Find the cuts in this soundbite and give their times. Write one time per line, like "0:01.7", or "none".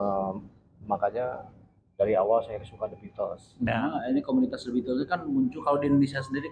0:03.7